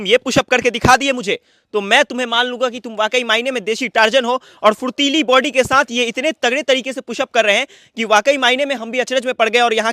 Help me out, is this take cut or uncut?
uncut